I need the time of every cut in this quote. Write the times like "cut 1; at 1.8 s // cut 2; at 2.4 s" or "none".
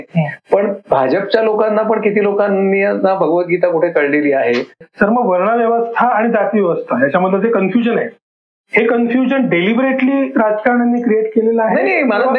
cut 1; at 4.8 s